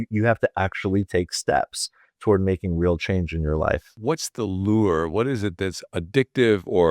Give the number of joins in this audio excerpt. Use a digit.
1